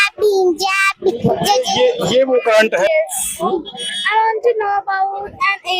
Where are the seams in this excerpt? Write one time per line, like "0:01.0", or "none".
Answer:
0:02.9